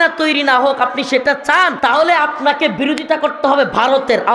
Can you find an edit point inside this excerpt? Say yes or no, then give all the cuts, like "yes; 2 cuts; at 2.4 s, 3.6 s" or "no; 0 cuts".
yes; 1 cut; at 1.7 s